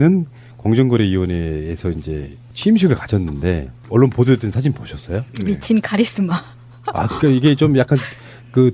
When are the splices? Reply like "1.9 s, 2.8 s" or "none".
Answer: 1.1 s